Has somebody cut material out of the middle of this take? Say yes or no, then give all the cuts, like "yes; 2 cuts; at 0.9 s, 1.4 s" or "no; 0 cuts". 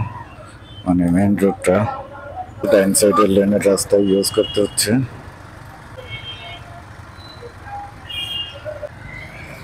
yes; 3 cuts; at 2.7 s, 5.9 s, 8.9 s